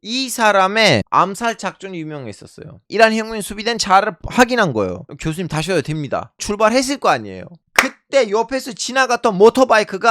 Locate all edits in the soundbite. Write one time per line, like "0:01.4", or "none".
0:02.9